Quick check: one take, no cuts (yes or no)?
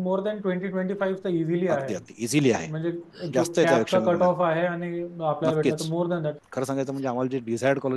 no